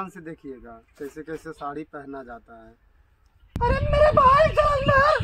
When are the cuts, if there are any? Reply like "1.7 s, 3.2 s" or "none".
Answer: 3.5 s